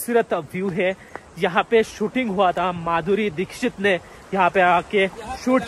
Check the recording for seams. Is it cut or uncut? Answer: uncut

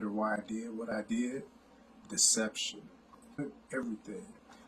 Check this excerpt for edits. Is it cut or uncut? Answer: cut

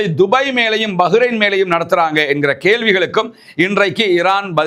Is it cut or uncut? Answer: uncut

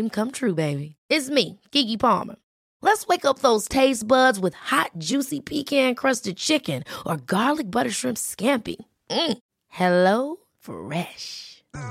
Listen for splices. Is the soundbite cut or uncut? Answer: uncut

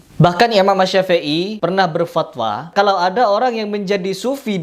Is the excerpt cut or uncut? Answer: cut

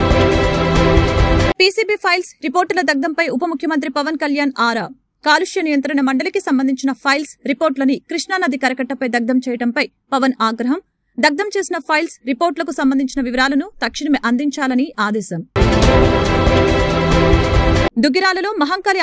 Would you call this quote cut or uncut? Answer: cut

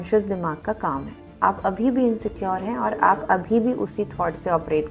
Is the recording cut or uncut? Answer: uncut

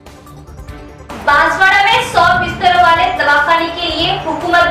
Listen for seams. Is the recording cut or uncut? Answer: cut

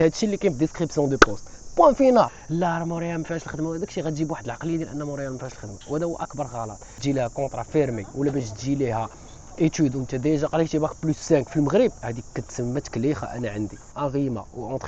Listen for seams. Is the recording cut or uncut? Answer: cut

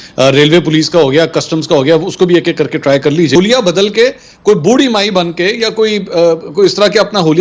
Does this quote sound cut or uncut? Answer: cut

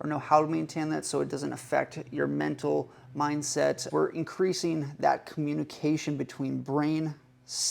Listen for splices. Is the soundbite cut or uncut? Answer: cut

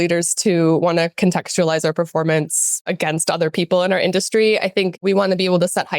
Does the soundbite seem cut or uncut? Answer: cut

